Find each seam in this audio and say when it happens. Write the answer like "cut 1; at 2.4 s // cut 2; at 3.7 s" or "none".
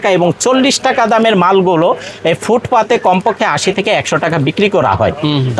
none

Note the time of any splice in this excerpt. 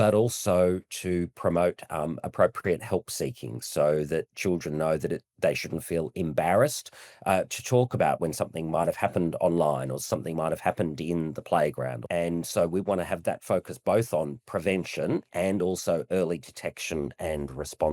cut 1; at 12.0 s

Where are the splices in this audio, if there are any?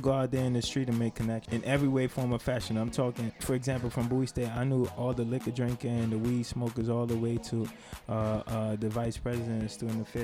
cut 1; at 1.4 s // cut 2; at 3.4 s

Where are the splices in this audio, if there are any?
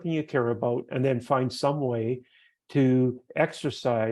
none

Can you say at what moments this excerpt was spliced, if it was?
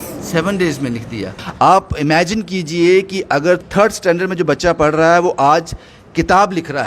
cut 1; at 1.4 s // cut 2; at 3.6 s

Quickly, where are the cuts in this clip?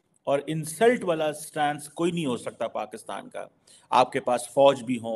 none

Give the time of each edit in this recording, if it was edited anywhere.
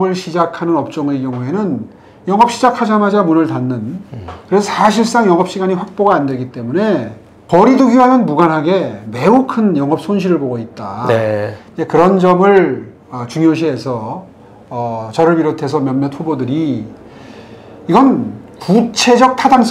none

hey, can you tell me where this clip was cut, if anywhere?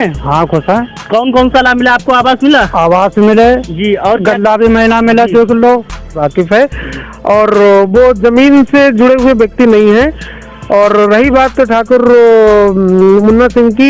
cut 1; at 6.2 s

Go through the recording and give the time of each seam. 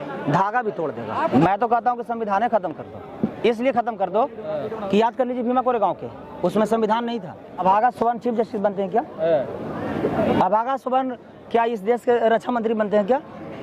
cut 1; at 1.3 s // cut 2; at 7.6 s

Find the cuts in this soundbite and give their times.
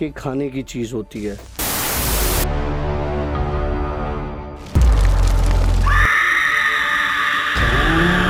none

